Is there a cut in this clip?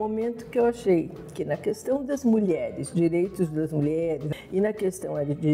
yes; 1 cut; at 4.2 s

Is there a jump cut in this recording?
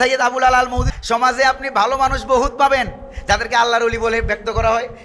yes; 1 cut; at 0.9 s

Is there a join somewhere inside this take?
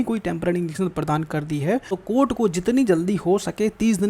yes; 1 cut; at 1.9 s

